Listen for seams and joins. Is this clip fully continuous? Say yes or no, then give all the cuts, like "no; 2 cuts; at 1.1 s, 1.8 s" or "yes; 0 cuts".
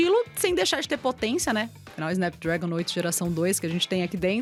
yes; 0 cuts